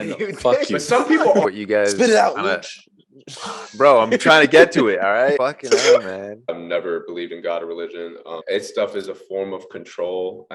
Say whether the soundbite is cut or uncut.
cut